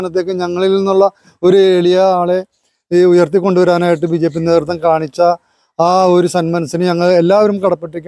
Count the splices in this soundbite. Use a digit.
0